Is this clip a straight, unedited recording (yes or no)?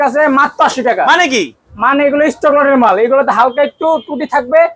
yes